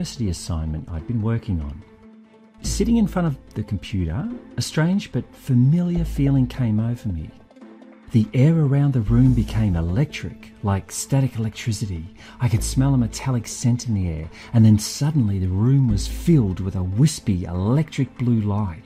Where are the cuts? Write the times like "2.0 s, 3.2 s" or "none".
none